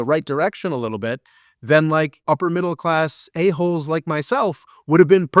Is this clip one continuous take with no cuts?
no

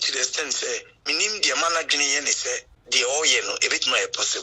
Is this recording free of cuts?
no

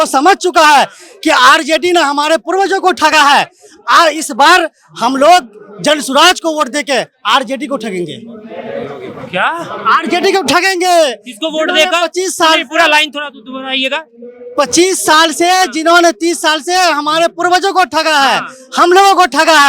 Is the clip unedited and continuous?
yes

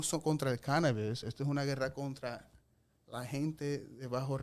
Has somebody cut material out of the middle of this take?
no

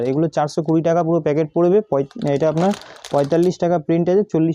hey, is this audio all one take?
yes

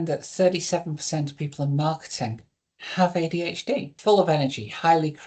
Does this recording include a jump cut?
yes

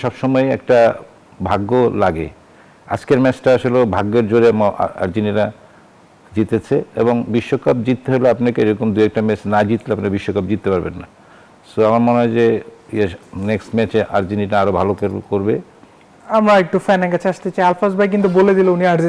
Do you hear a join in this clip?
no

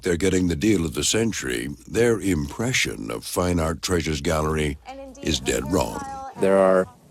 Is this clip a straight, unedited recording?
no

